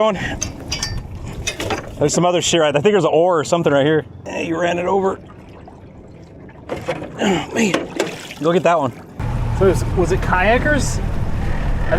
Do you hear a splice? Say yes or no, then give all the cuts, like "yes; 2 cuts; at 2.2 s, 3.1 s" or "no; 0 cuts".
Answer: no; 0 cuts